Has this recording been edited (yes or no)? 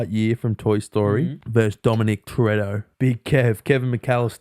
yes